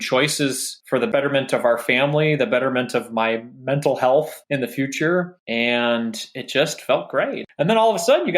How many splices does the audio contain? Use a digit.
4